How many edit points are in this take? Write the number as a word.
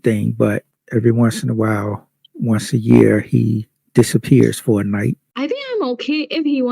one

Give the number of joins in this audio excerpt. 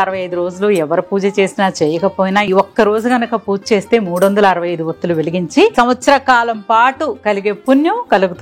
two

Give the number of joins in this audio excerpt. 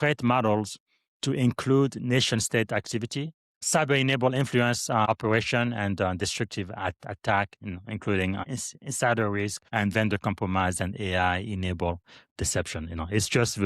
four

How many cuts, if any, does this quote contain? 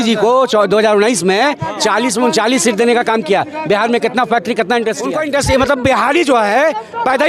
one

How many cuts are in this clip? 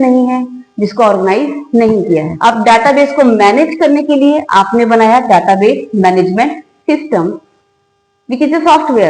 one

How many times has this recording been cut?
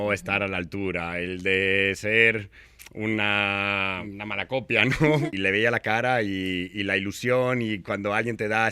two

